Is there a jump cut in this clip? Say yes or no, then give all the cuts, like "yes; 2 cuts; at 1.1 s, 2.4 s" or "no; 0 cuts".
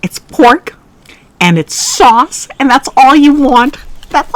no; 0 cuts